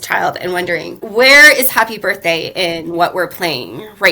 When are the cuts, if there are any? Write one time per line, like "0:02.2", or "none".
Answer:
0:01.0